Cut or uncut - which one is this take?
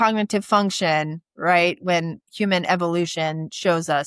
uncut